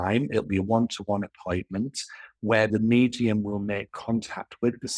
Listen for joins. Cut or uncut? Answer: cut